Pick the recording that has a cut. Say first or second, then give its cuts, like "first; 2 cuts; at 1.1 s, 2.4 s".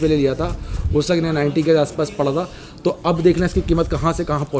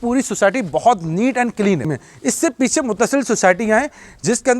second; 1 cut; at 1.9 s